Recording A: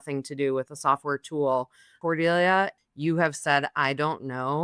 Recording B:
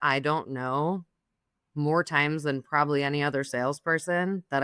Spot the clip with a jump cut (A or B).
A